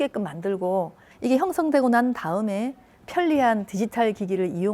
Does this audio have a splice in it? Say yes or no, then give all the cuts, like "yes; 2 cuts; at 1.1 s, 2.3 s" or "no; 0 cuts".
yes; 1 cut; at 1.0 s